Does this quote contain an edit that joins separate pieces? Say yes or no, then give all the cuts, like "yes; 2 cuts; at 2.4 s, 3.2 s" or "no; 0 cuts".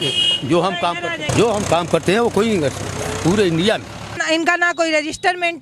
yes; 2 cuts; at 1.3 s, 4.2 s